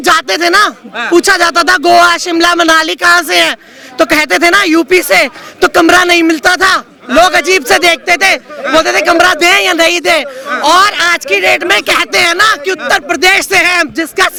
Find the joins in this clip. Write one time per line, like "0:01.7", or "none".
none